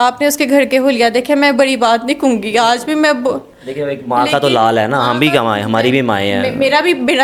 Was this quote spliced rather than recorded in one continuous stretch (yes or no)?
no